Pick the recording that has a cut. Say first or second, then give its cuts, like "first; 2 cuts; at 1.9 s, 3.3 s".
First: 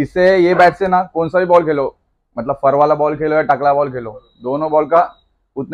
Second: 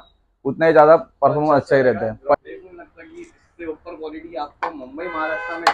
second; 1 cut; at 2.3 s